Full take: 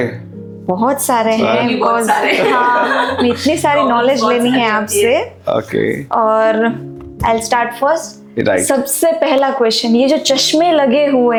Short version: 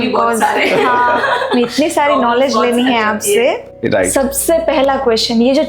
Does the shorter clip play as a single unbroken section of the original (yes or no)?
no